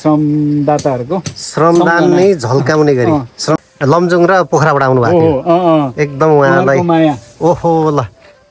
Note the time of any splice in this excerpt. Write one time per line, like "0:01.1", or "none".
0:03.6